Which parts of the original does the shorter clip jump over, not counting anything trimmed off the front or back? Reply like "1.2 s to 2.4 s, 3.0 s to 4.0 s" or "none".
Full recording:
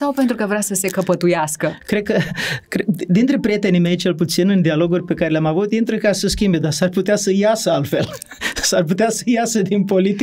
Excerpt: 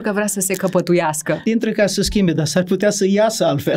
1.8 s to 5.7 s